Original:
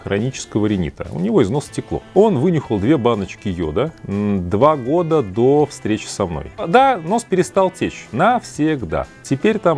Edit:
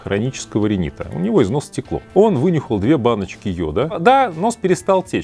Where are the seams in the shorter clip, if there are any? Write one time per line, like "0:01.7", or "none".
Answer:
0:03.9